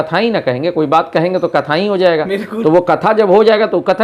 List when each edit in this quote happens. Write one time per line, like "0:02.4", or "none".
none